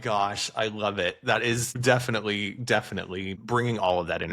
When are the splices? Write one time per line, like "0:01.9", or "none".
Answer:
0:01.8
0:03.4

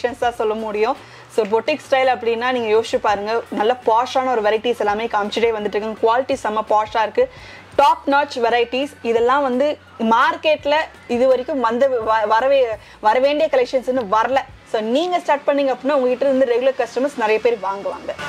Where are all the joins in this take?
none

